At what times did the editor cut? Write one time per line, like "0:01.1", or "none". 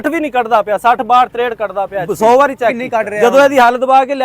0:02.0
0:02.8